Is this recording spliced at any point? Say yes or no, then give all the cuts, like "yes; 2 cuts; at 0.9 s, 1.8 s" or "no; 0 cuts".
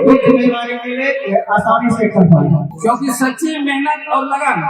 yes; 1 cut; at 2.7 s